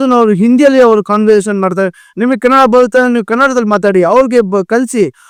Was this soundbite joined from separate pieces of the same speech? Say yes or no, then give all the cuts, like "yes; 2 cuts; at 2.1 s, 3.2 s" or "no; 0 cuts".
no; 0 cuts